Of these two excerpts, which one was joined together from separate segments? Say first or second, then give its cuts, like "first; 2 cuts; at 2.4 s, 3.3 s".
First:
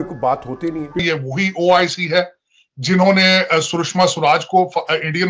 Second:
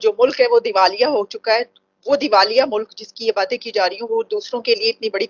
first; 1 cut; at 1.0 s